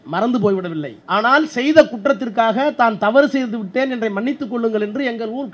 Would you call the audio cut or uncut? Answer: cut